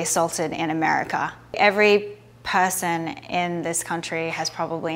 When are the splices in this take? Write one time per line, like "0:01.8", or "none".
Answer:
0:01.5

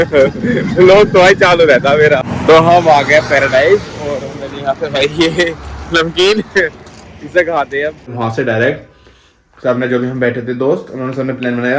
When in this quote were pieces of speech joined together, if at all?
0:02.3
0:08.1

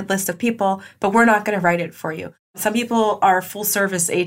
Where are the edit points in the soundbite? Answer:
0:02.5

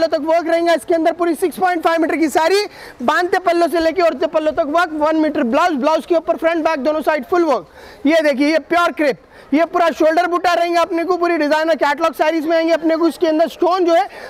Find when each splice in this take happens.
none

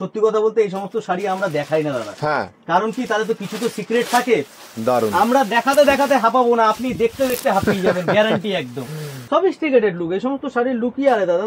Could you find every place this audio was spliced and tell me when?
0:04.5
0:09.1

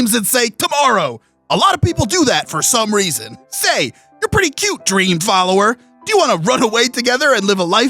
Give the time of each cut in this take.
0:03.2

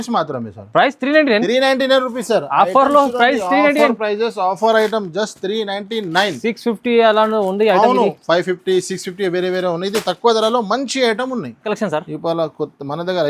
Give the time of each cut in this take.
0:11.6

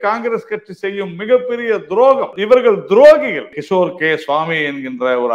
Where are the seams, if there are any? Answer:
0:02.3
0:03.6

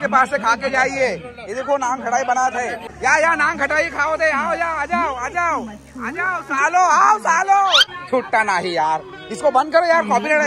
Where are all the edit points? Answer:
0:02.9
0:07.8

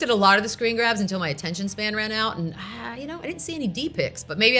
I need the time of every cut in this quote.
none

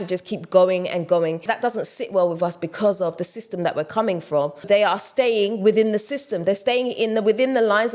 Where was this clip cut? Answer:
0:01.4
0:04.6

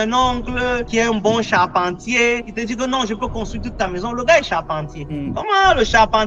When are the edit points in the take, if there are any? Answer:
none

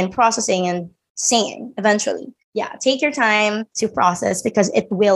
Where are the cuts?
0:02.4
0:03.7

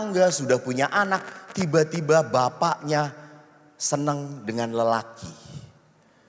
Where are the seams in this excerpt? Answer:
none

